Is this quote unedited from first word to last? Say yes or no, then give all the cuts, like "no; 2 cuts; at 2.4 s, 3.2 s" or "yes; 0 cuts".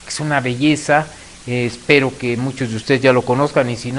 yes; 0 cuts